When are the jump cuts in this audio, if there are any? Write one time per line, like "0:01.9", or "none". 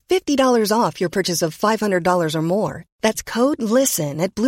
none